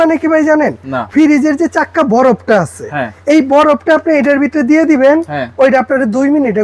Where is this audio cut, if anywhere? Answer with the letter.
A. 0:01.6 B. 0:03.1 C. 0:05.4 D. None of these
D